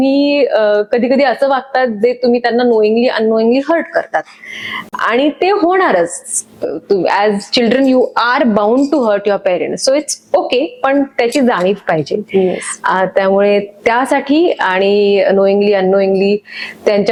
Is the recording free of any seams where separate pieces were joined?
yes; 0 cuts

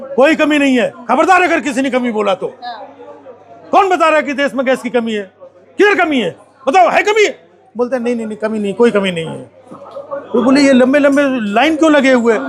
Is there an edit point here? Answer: no; 0 cuts

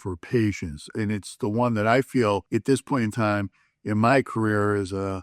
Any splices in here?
yes; 1 cut; at 2.4 s

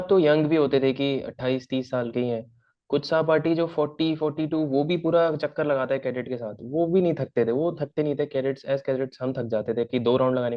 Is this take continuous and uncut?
yes; 0 cuts

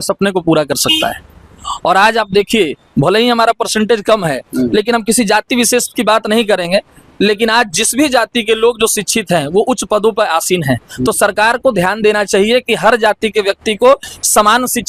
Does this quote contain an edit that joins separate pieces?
no; 0 cuts

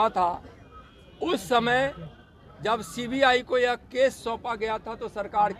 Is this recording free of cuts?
yes; 0 cuts

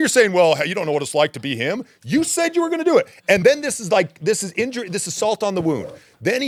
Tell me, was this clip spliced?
no; 0 cuts

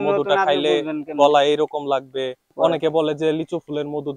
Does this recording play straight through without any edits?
no; 1 cut; at 2.5 s

